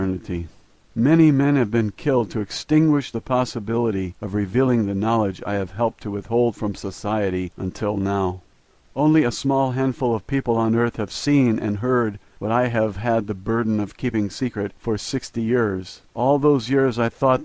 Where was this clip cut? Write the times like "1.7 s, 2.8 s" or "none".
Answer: none